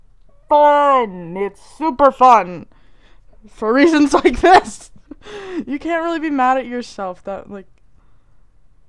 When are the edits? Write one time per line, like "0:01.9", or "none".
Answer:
none

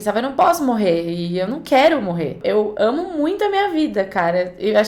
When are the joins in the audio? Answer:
0:02.4

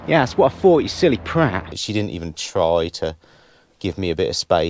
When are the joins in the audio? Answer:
0:01.8

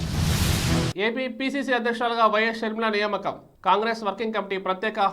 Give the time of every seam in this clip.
0:00.9

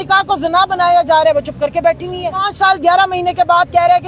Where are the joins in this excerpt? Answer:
0:02.5

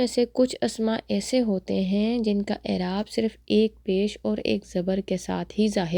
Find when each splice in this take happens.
none

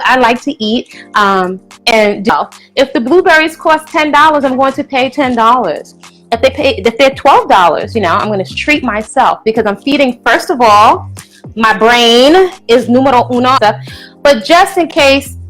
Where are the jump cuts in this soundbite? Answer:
0:02.3
0:08.5
0:13.6

